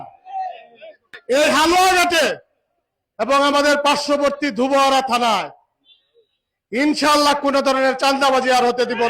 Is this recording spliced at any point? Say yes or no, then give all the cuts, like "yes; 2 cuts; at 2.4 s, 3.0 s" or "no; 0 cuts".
yes; 1 cut; at 1.1 s